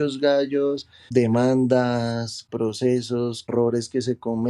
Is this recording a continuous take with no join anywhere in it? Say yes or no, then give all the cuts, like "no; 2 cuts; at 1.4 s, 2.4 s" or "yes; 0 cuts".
no; 3 cuts; at 1.0 s, 2.4 s, 3.5 s